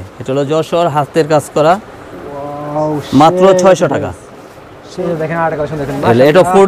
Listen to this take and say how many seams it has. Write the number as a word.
one